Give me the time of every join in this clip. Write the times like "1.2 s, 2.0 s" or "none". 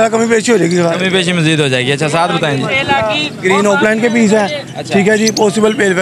none